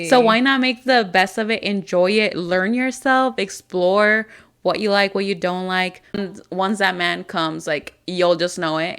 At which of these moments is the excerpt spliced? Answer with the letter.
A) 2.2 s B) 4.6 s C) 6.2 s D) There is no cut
C